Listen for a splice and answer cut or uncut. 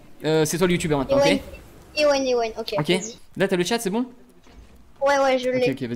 cut